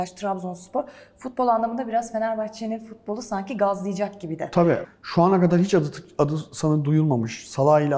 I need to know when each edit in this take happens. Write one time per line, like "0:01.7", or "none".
0:04.9